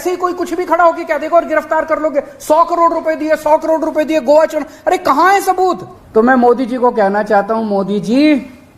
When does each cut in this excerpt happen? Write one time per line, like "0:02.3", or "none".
0:05.9